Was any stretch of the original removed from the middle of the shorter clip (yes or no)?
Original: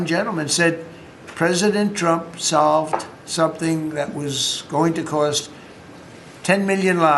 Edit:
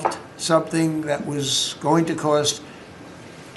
no